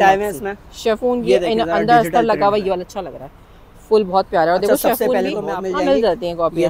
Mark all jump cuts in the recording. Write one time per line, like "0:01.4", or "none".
0:05.4